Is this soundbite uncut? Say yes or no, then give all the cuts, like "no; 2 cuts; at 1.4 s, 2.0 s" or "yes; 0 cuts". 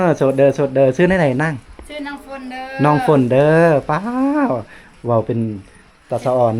yes; 0 cuts